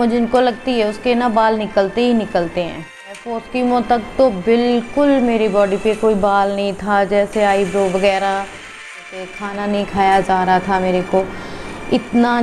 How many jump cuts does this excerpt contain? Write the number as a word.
two